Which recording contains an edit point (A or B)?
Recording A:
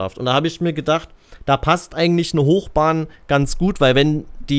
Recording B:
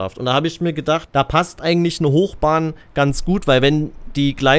B